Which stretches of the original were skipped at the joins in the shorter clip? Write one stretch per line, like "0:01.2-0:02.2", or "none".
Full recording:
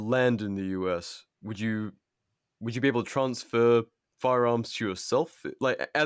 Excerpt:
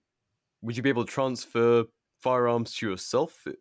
none